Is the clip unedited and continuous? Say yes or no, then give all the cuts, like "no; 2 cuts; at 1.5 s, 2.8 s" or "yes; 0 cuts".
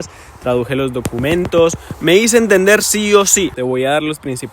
no; 2 cuts; at 1.9 s, 3.6 s